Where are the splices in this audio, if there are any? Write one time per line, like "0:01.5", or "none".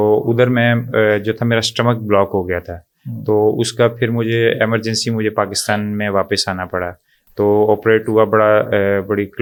none